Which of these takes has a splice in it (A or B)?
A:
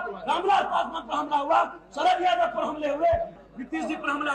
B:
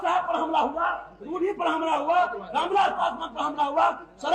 A